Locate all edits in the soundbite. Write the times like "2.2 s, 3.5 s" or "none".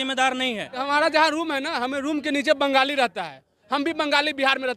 0.8 s, 3.6 s